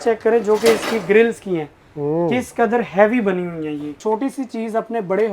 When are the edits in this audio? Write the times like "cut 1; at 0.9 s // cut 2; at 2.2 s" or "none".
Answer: cut 1; at 4.0 s